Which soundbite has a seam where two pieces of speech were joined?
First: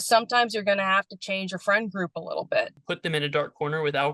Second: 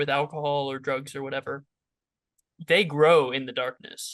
first; 1 cut; at 2.8 s

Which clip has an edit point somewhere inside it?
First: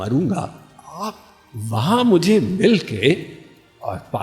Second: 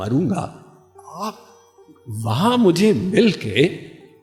first; 1 cut; at 1.0 s

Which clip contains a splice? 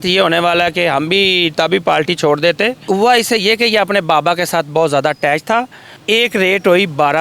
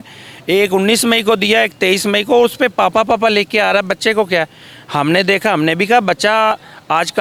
first; 2 cuts; at 2.8 s, 5.9 s

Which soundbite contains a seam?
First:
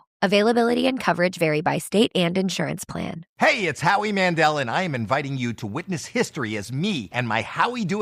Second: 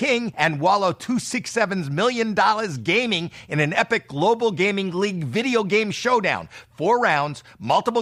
first; 1 cut; at 3.2 s

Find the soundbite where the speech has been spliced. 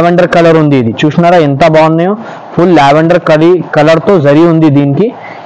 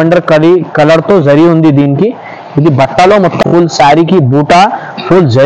second; 1 cut; at 3.4 s

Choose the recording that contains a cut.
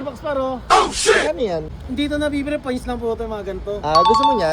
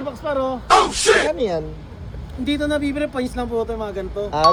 first; 1 cut; at 1.8 s

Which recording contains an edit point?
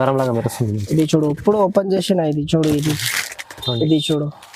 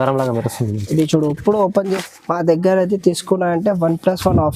second; 1 cut; at 2.0 s

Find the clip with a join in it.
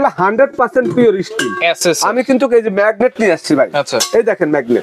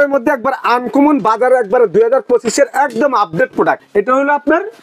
second; 1 cut; at 3.8 s

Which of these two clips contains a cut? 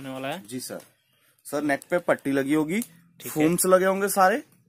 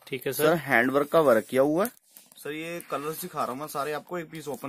second; 1 cut; at 2.1 s

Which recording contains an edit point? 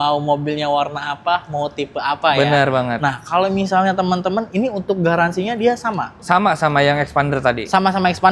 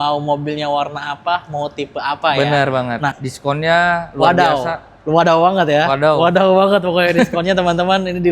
second; 1 cut; at 3.2 s

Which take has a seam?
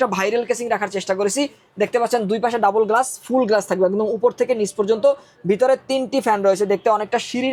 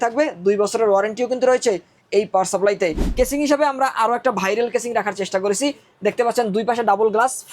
second; 1 cut; at 3.1 s

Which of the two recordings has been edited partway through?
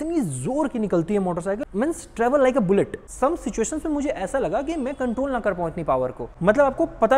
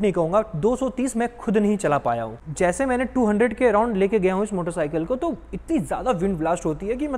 first; 3 cuts; at 1.6 s, 3.0 s, 6.3 s

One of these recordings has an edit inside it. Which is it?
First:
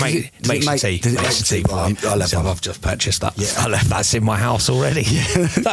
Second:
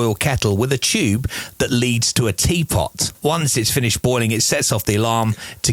second; 1 cut; at 3.2 s

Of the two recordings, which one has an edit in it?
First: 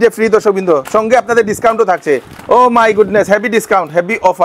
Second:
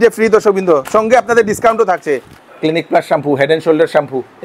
second; 1 cut; at 2.3 s

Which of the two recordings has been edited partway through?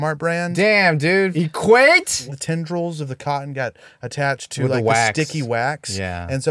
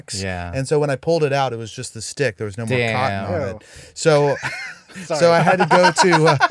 first; 2 cuts; at 1.3 s, 2.3 s

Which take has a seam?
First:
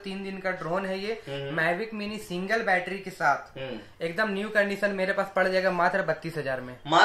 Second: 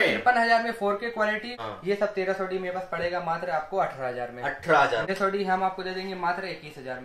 second; 2 cuts; at 1.6 s, 5.0 s

